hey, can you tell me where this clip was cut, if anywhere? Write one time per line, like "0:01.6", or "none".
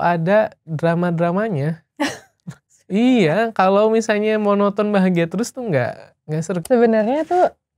0:06.6